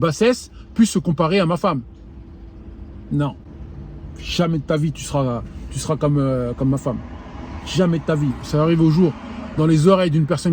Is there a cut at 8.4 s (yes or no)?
yes